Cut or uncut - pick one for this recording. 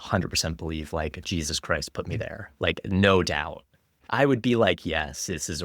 cut